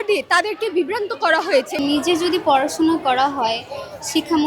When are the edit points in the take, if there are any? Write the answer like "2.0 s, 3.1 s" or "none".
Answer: 1.7 s